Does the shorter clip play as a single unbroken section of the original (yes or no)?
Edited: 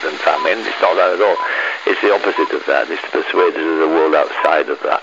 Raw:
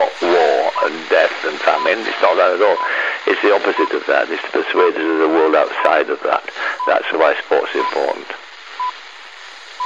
yes